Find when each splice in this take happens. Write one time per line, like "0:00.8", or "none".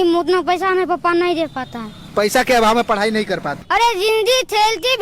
0:03.5